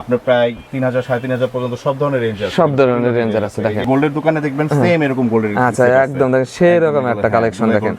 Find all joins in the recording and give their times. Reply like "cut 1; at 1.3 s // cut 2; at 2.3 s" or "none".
cut 1; at 3.8 s